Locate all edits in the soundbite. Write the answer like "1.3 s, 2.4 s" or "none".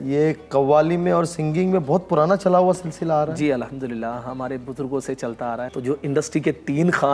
5.7 s